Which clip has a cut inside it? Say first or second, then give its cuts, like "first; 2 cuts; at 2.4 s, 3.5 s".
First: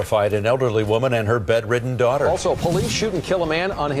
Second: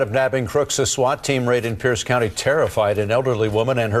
first; 1 cut; at 2.5 s